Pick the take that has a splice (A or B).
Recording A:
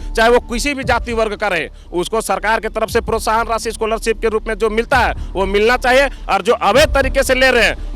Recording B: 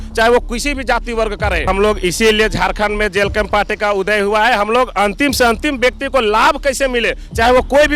B